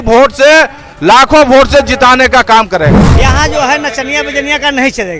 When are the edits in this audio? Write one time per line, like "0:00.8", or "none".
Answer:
0:03.1